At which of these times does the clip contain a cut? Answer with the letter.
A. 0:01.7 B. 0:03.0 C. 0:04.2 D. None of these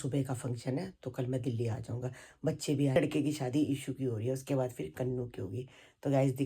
B